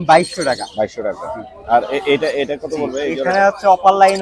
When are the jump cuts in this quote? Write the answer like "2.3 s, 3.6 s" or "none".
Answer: none